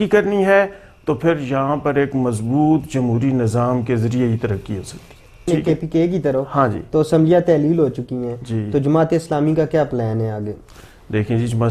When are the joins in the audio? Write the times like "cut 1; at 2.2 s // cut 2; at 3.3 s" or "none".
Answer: cut 1; at 5.4 s